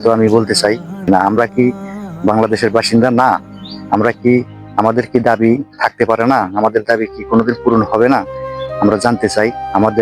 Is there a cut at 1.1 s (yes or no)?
yes